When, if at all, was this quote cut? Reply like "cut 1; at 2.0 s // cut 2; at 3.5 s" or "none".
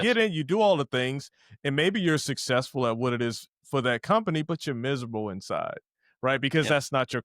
none

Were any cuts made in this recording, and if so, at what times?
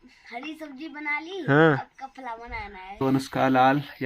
cut 1; at 2.8 s

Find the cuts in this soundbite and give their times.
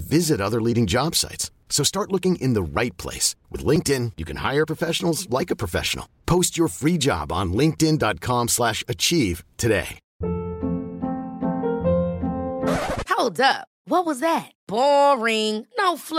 cut 1; at 10.0 s

